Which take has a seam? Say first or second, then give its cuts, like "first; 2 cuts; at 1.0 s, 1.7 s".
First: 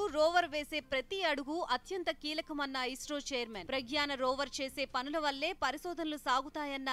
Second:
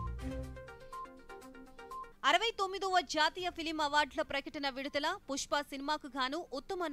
second; 1 cut; at 2.1 s